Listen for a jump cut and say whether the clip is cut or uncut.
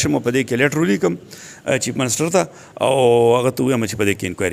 uncut